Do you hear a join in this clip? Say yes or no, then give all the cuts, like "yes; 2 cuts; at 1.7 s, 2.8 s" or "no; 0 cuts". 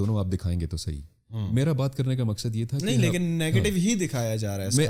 no; 0 cuts